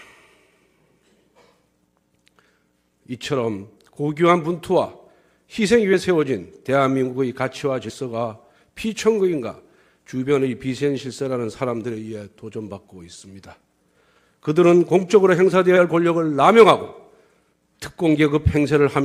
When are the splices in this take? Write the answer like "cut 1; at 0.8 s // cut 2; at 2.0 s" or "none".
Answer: none